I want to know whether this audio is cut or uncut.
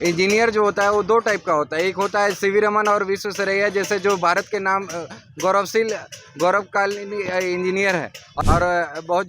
cut